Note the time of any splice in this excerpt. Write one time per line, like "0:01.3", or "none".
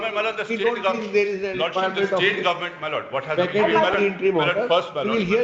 none